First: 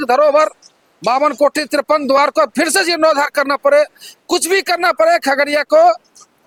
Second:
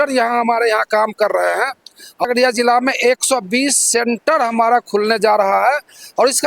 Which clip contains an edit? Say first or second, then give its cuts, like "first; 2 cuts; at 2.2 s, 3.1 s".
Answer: second; 1 cut; at 2.2 s